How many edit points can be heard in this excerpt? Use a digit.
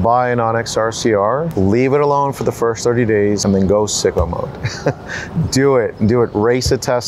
2